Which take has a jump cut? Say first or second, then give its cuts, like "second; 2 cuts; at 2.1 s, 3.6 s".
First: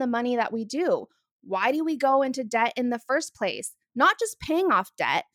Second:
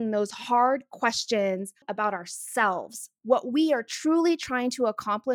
second; 1 cut; at 1.9 s